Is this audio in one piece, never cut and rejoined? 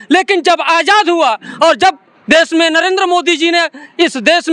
yes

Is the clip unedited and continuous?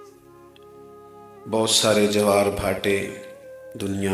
no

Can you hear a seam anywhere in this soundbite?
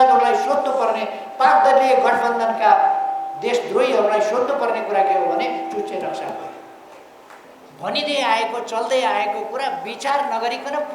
yes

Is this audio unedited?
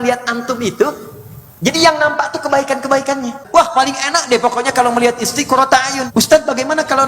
no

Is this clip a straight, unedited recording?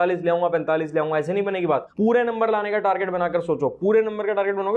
yes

